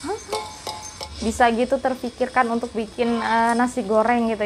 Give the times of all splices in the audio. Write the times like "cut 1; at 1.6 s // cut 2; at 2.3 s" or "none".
cut 1; at 1.0 s